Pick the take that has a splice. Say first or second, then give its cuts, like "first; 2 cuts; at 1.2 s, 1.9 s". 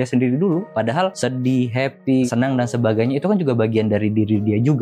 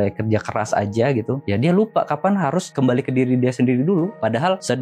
first; 1 cut; at 2.3 s